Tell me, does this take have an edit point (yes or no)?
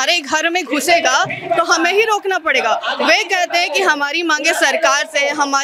no